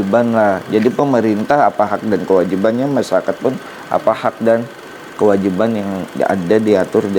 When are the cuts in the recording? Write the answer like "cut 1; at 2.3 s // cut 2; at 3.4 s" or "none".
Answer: none